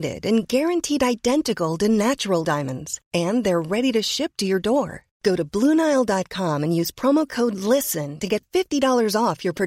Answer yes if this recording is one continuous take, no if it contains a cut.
yes